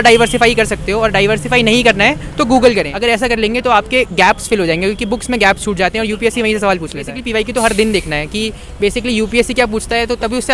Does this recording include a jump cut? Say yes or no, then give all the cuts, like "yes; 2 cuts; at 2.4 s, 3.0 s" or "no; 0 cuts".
yes; 2 cuts; at 2.9 s, 7.2 s